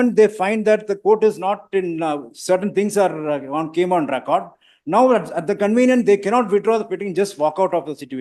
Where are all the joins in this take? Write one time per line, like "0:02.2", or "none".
none